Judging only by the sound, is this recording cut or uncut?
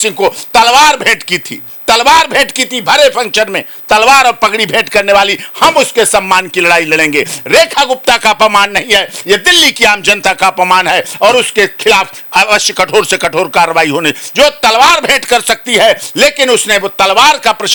uncut